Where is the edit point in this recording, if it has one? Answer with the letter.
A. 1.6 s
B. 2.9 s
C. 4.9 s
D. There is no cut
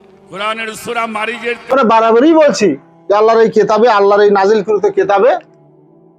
A